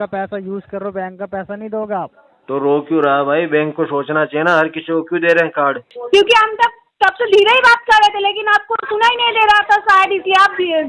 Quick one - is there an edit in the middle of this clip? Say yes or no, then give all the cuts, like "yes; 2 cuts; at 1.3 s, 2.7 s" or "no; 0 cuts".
yes; 1 cut; at 5.9 s